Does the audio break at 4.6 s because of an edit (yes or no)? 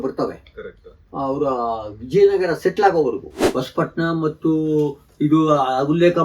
no